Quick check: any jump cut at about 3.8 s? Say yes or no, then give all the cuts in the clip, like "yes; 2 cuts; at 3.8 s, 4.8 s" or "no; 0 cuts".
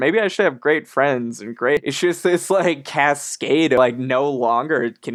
yes; 2 cuts; at 1.8 s, 3.8 s